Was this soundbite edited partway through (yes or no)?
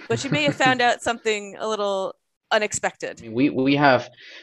yes